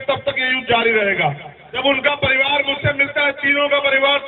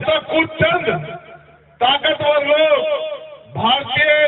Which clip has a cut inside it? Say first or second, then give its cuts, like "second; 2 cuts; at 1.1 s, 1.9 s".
first; 1 cut; at 1.8 s